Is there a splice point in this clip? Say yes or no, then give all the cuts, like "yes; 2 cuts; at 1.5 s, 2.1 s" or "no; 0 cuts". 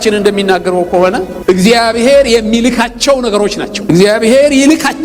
no; 0 cuts